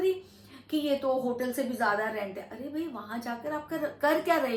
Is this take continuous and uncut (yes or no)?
yes